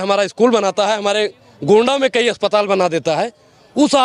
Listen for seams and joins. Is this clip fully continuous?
yes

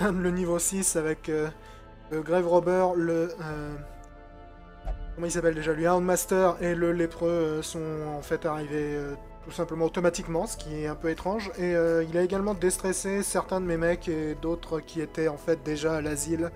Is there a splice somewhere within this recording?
no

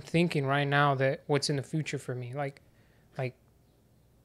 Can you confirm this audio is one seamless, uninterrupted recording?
yes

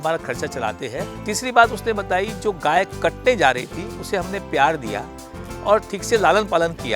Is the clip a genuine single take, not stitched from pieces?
no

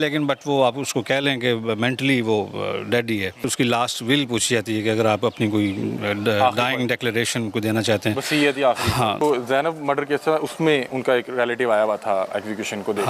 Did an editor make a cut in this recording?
yes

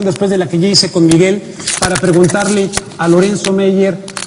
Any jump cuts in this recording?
yes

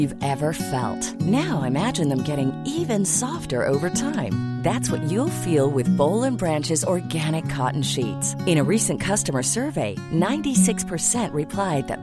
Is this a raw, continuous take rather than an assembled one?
yes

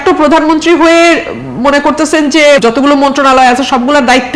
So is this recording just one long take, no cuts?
no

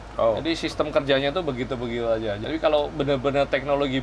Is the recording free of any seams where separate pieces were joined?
no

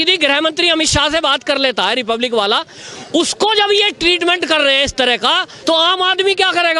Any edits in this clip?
no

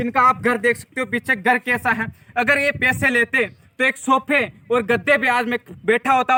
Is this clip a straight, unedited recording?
yes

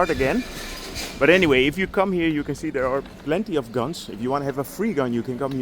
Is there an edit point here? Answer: yes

